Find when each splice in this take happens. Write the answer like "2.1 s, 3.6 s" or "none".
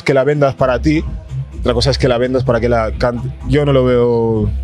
none